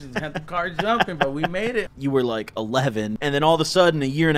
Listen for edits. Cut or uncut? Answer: cut